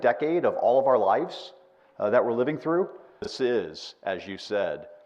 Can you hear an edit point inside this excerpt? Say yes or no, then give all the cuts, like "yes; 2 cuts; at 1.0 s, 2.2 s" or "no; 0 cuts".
yes; 1 cut; at 3.2 s